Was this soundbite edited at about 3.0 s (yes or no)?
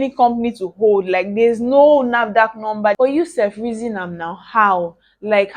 yes